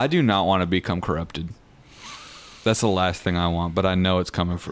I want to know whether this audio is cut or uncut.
uncut